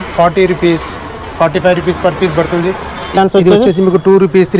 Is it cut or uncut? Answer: cut